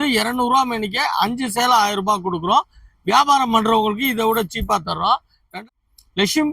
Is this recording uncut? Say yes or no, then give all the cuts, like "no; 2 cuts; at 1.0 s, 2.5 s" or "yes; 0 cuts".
no; 1 cut; at 5.5 s